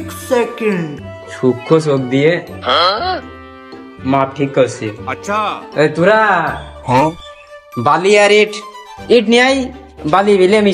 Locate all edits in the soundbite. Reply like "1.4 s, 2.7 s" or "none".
none